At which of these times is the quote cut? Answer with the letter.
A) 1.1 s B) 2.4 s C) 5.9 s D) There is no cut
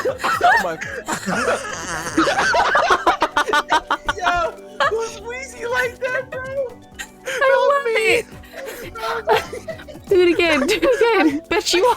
A